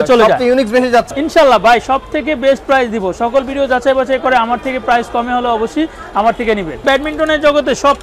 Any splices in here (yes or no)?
yes